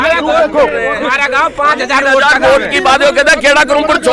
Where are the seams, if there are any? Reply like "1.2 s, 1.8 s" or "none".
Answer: none